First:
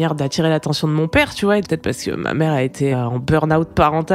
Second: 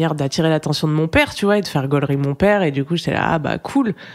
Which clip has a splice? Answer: first; 2 cuts; at 1.7 s, 2.9 s

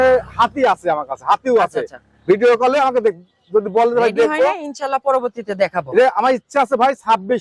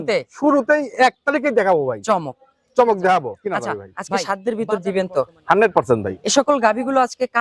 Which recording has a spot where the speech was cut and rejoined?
second; 1 cut; at 3.9 s

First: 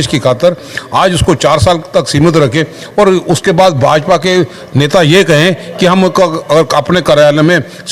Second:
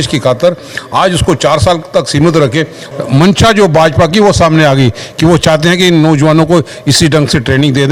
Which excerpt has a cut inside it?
second; 1 cut; at 2.8 s

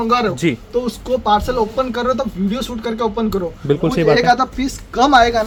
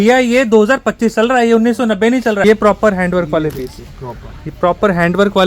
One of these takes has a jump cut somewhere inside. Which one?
second; 1 cut; at 2.4 s

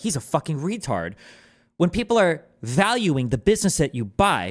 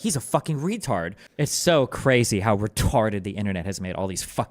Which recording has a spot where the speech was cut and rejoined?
second; 1 cut; at 1.2 s

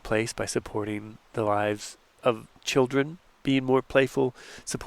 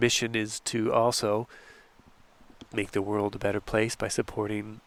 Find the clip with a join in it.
first; 1 cut; at 3.2 s

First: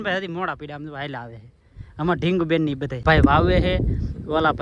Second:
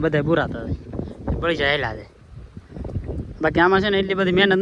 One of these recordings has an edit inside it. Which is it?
first; 1 cut; at 3.0 s

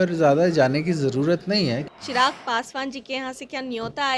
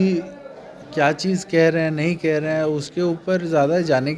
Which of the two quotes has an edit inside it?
first; 1 cut; at 1.9 s

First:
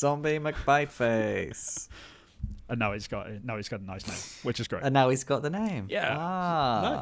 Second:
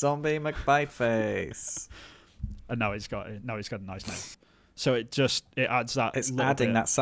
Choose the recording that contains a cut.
second; 1 cut; at 4.3 s

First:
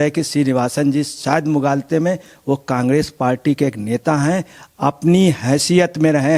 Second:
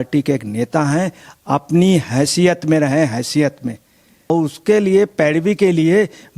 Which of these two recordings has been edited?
second; 1 cut; at 4.3 s

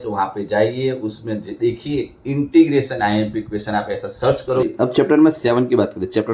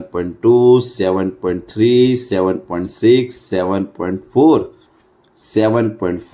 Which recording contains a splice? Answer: first; 1 cut; at 4.6 s

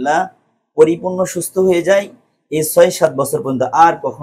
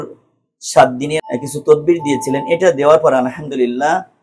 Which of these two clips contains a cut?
second; 1 cut; at 1.2 s

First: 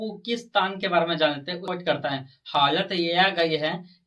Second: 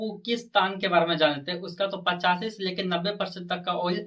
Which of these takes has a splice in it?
first; 1 cut; at 1.6 s

